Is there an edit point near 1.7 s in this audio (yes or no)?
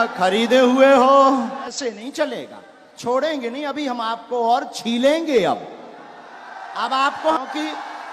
yes